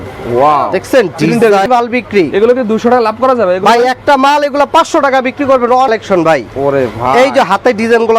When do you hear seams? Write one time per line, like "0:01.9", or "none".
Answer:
0:01.7
0:05.9